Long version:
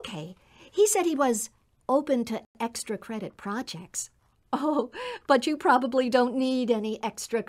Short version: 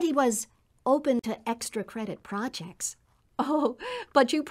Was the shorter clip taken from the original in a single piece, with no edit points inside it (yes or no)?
no